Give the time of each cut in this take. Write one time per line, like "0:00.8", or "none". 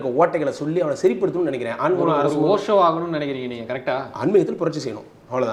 none